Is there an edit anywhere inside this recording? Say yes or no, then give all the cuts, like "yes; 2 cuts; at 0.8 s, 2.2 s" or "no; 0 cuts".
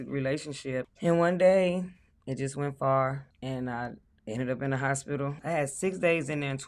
yes; 3 cuts; at 0.9 s, 3.3 s, 5.4 s